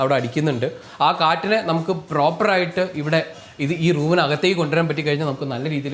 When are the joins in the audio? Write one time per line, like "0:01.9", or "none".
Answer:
none